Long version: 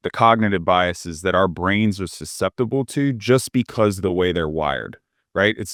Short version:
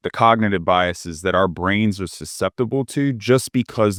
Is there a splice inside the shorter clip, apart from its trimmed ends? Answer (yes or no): no